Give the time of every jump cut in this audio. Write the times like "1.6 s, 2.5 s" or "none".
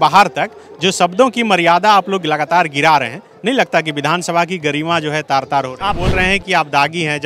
6.0 s